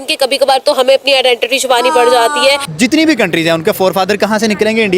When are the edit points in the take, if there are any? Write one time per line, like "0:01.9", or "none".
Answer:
0:02.7